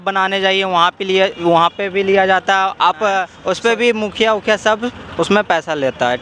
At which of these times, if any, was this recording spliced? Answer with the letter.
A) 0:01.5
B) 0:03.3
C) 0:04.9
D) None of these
B